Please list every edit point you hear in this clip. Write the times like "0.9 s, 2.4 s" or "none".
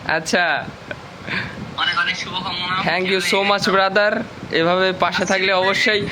none